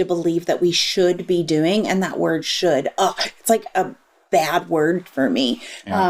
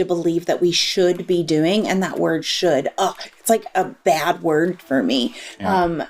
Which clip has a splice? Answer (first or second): second